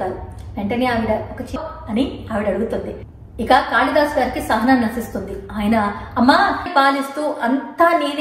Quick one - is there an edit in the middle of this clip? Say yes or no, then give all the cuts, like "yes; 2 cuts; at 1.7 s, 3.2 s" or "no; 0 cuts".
yes; 2 cuts; at 1.6 s, 6.7 s